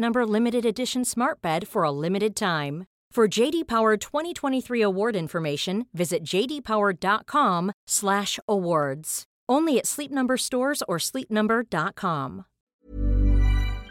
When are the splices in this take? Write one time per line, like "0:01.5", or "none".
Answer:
0:12.8